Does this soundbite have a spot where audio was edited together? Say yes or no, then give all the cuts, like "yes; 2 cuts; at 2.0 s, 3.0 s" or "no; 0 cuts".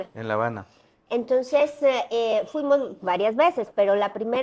no; 0 cuts